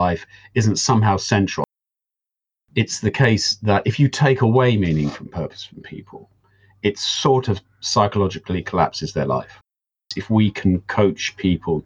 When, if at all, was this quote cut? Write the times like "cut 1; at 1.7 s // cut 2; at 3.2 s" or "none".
cut 1; at 10.1 s